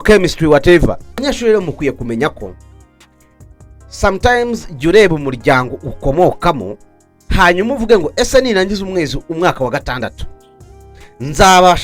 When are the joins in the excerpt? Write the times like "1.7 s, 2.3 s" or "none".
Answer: 1.2 s